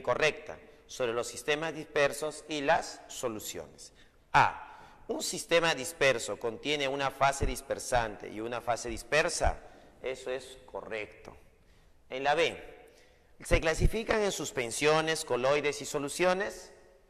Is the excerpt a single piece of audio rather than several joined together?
yes; 0 cuts

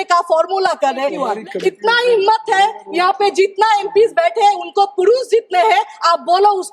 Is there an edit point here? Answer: yes; 1 cut; at 1.2 s

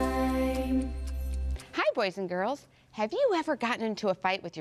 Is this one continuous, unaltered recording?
no; 1 cut; at 3.2 s

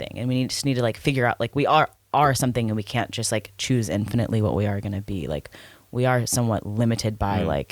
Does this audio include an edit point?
no; 0 cuts

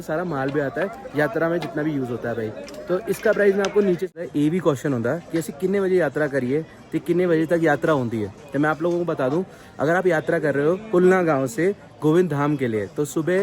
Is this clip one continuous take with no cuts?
no; 1 cut; at 4.1 s

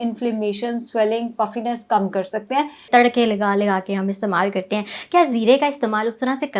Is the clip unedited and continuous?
no; 1 cut; at 2.8 s

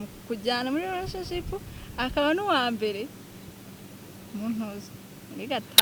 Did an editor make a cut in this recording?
no; 0 cuts

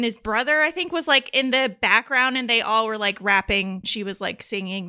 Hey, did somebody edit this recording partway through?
yes; 1 cut; at 3.9 s

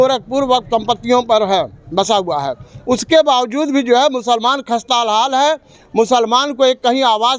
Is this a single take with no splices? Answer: yes; 0 cuts

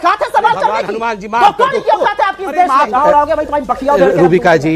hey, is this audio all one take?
no; 1 cut; at 2.9 s

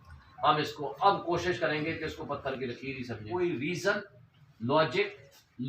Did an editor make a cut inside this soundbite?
yes; 1 cut; at 3.2 s

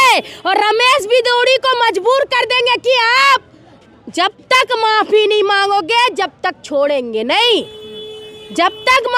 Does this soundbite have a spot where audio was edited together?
no; 0 cuts

